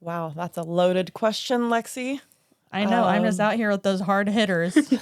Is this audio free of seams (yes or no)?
yes